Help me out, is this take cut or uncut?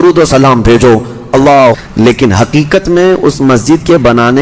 cut